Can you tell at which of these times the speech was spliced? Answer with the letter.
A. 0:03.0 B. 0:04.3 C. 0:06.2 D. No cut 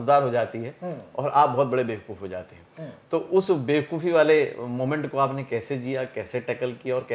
D